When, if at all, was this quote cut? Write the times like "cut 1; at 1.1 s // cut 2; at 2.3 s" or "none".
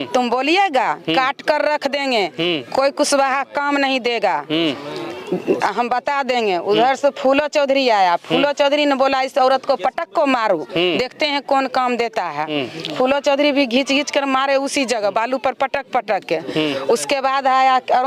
none